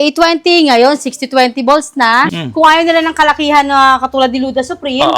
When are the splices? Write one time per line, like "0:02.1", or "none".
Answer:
0:02.4

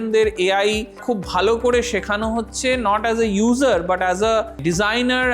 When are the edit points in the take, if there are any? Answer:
0:00.9
0:04.5

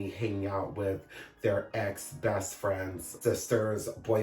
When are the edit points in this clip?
0:03.0

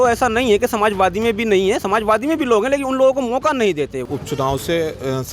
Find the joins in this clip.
0:04.1

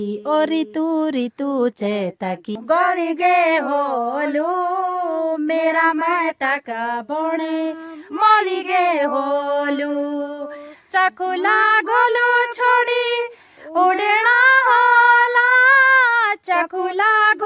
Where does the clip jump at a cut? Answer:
0:02.5

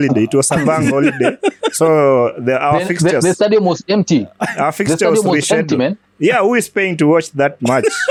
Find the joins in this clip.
none

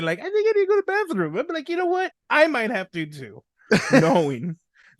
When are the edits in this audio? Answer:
0:02.2

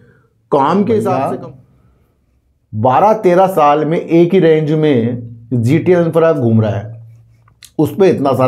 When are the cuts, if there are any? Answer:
0:01.1

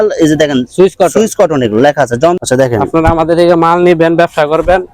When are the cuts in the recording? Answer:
0:02.4

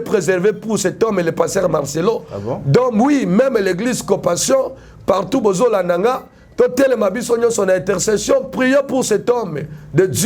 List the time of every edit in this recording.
none

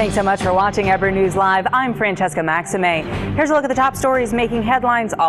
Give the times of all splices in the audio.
none

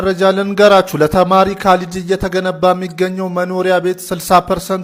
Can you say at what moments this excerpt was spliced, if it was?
none

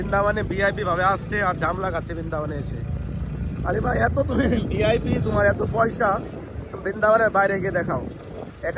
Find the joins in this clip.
none

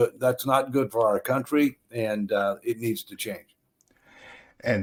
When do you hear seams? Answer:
none

